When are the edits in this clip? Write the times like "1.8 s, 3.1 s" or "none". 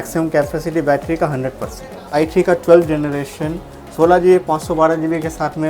2.1 s